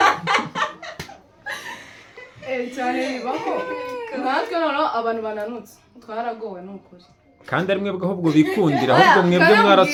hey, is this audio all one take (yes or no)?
yes